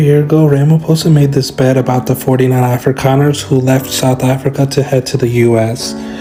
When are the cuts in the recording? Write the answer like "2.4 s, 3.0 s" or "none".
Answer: none